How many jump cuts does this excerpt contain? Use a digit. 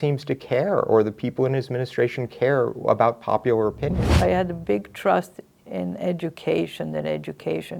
1